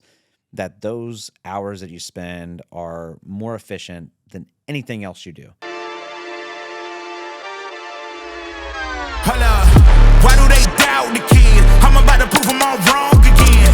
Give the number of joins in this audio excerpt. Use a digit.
1